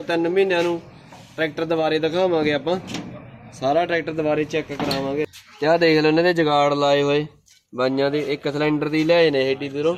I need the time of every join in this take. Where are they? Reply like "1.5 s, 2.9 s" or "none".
5.3 s